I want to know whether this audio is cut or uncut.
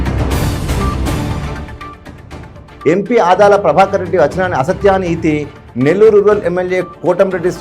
uncut